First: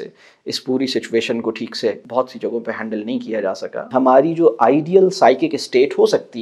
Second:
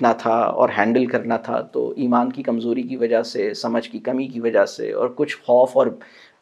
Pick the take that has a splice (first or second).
first